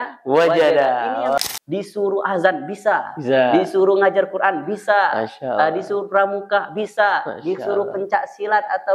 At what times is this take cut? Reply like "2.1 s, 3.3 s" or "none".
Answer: 1.4 s

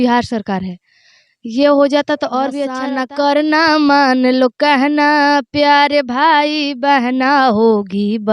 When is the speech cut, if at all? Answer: 2.7 s

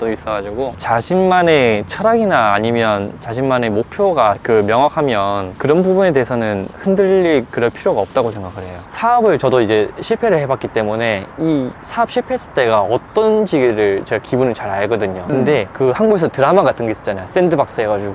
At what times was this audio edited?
8.8 s

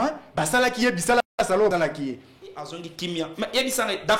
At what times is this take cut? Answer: 2.8 s

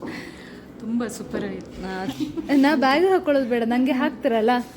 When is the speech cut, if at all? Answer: 2.1 s

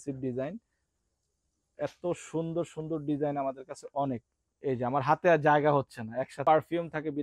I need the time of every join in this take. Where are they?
6.3 s

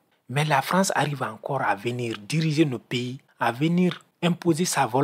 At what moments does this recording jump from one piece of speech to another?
3.2 s, 4.1 s

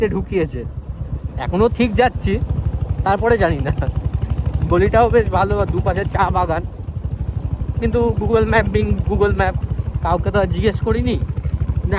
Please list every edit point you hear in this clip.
none

